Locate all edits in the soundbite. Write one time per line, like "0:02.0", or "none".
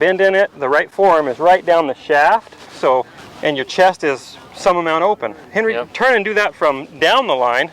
0:03.2